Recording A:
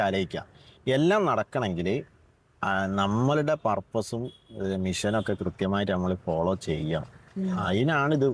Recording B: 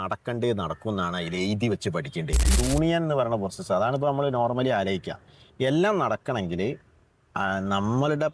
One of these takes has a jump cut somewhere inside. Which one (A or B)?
B